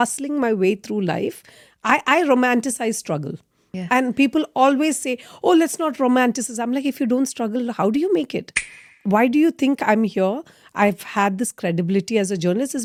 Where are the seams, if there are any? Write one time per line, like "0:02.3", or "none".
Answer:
none